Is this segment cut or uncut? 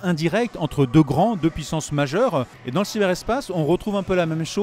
cut